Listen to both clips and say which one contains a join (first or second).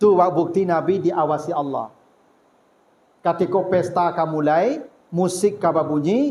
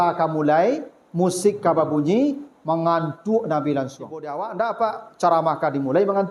second